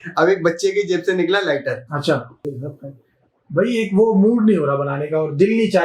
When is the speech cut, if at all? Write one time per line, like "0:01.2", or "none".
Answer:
0:02.5